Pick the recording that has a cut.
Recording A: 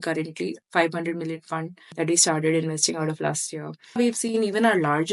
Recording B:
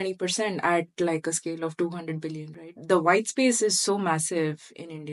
A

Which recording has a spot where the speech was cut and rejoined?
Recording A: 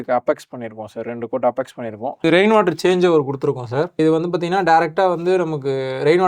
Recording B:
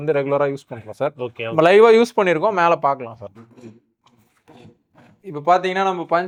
A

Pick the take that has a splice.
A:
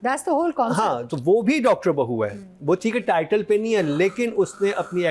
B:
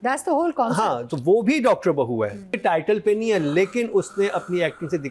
B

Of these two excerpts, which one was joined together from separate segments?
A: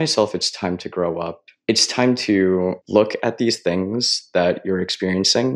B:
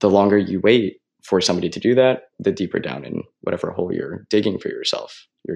A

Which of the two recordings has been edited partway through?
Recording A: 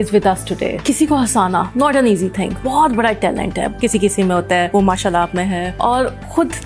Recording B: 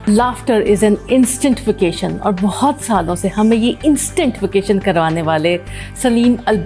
A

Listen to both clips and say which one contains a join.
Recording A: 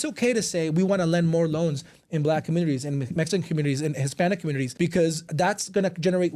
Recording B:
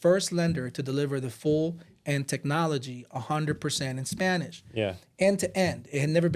A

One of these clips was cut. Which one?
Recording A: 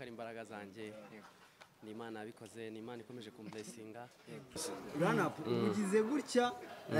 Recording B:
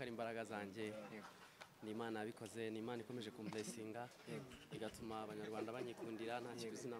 A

